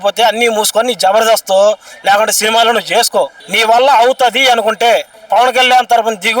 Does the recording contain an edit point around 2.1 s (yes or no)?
no